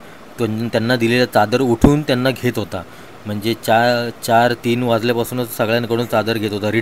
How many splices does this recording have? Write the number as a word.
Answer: zero